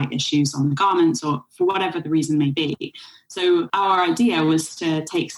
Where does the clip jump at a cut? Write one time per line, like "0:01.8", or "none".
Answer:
0:03.7